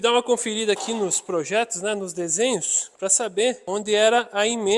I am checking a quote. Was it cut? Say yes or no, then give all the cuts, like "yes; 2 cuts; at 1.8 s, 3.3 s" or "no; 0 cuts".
no; 0 cuts